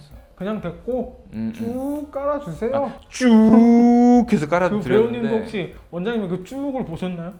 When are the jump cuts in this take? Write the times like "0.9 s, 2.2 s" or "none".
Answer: none

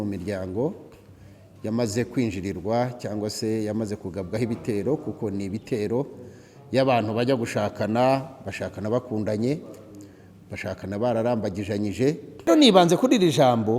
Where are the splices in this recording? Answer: 12.5 s

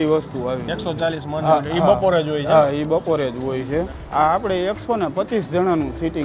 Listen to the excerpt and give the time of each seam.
3.9 s

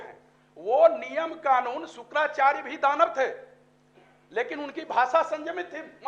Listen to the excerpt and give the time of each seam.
none

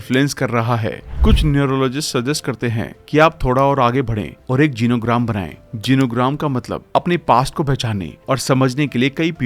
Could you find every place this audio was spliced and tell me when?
1.1 s

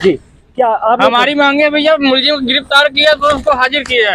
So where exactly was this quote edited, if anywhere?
none

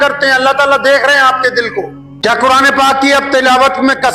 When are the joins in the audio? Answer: 2.0 s

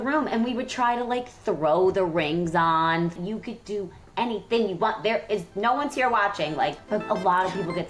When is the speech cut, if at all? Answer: 3.2 s, 6.8 s

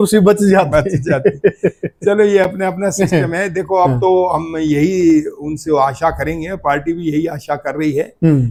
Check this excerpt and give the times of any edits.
none

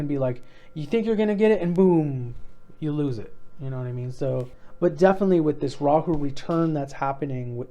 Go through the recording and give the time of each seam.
4.6 s

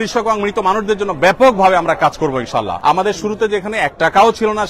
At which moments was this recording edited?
2.7 s

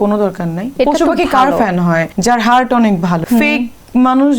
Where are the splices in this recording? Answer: 0.7 s, 2.1 s, 3.2 s

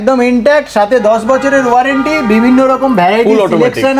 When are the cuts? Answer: none

